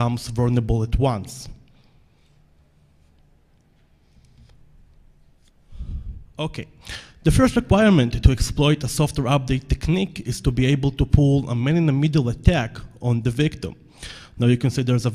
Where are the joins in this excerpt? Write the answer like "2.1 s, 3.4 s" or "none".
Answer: 4.0 s